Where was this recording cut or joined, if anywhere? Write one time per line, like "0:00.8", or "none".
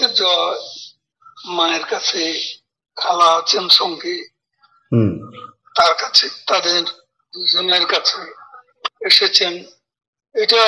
none